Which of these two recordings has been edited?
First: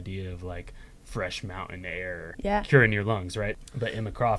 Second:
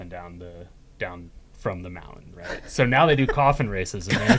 first; 2 cuts; at 2.4 s, 3.6 s

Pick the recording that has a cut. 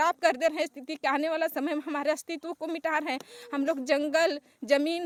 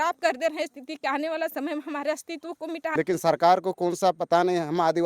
second; 1 cut; at 2.9 s

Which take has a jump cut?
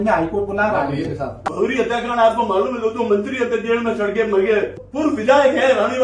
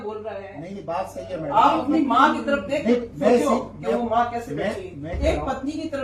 first; 2 cuts; at 1.4 s, 4.8 s

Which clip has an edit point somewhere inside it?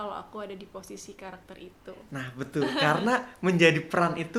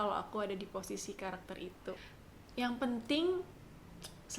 second; 1 cut; at 2.0 s

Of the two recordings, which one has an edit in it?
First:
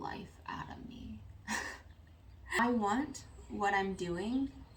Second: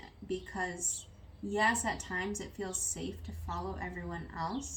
first; 1 cut; at 2.6 s

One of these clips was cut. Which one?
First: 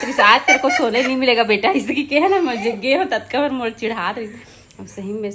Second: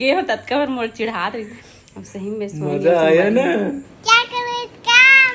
second; 1 cut; at 3.9 s

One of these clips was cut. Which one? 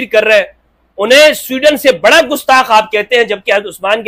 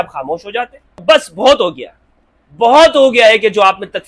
second; 1 cut; at 0.9 s

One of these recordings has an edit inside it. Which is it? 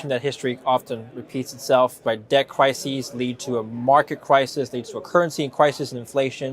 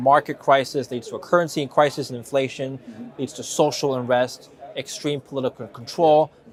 first; 1 cut; at 2.0 s

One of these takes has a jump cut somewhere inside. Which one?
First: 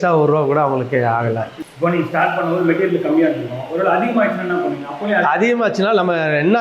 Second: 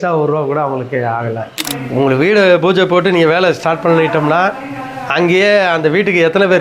second; 1 cut; at 1.6 s

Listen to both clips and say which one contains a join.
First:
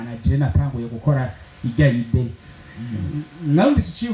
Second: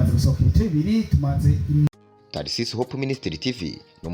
second; 1 cut; at 1.9 s

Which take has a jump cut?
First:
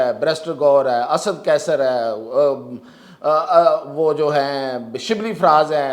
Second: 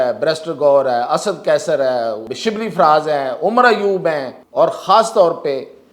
second; 2 cuts; at 2.2 s, 4.4 s

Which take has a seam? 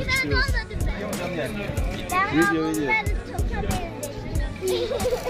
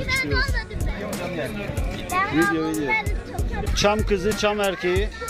second; 1 cut; at 3.6 s

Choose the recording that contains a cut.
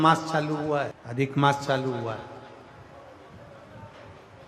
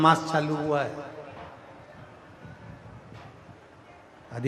first; 1 cut; at 1.0 s

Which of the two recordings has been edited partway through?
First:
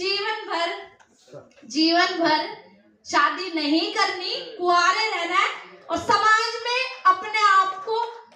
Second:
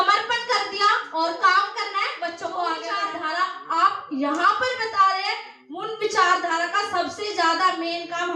second; 1 cut; at 3.0 s

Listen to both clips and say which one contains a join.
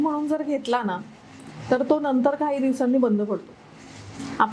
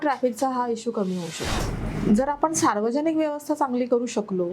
second; 1 cut; at 1.5 s

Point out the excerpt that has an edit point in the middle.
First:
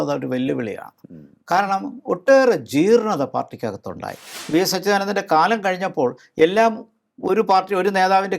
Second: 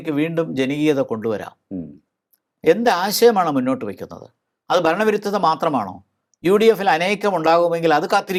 first; 1 cut; at 4.3 s

